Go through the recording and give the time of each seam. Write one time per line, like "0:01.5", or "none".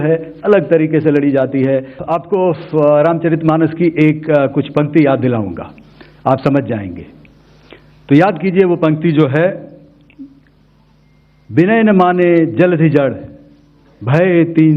0:02.0